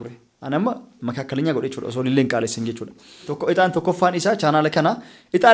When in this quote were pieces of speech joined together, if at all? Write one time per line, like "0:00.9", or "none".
0:03.3